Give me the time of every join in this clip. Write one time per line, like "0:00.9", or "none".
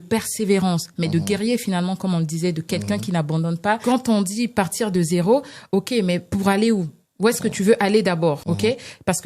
0:03.8
0:08.4